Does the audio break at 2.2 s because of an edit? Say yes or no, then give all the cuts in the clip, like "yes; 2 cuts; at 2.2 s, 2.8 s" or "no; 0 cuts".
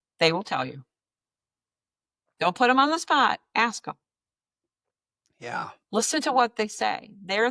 no; 0 cuts